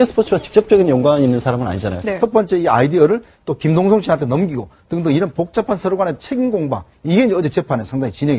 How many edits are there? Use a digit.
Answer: 0